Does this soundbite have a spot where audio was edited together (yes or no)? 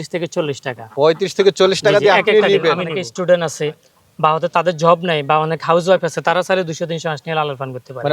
yes